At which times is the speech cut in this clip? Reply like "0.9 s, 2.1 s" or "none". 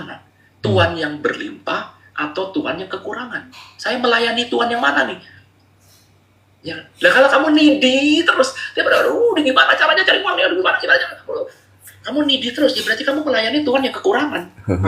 none